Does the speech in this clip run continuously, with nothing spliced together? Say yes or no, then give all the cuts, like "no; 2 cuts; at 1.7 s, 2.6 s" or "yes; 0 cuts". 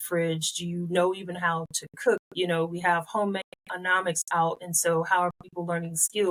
yes; 0 cuts